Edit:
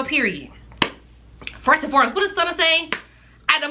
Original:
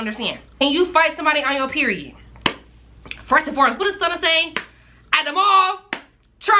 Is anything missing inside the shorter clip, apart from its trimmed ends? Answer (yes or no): no